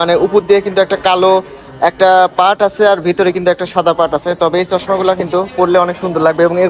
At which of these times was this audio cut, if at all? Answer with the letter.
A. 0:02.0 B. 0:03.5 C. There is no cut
C